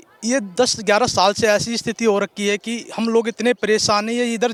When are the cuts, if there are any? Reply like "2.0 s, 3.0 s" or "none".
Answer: none